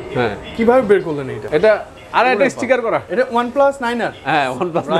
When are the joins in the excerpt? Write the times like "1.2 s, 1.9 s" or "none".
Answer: 1.3 s, 3.1 s